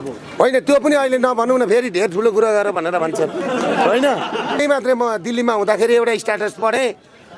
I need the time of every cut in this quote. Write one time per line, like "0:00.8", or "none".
0:04.6